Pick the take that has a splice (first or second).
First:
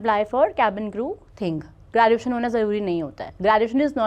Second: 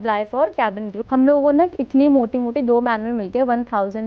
second